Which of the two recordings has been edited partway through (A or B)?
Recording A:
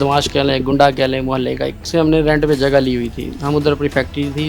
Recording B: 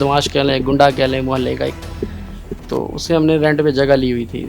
A